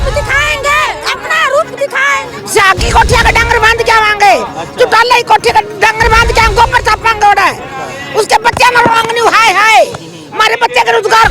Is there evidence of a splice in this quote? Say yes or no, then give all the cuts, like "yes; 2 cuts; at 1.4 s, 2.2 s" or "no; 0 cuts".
yes; 1 cut; at 2.3 s